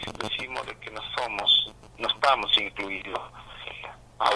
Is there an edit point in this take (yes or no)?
no